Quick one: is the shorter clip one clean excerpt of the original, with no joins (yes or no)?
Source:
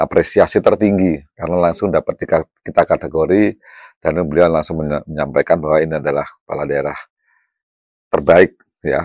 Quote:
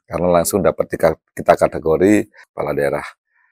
no